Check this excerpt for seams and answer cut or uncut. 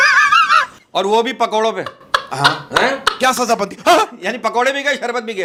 uncut